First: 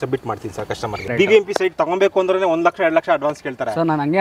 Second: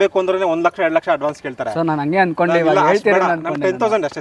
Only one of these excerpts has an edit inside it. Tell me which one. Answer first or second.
first